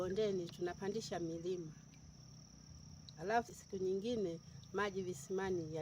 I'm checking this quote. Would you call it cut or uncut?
cut